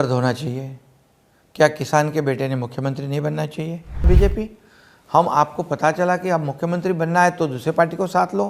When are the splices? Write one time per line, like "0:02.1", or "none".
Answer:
0:04.1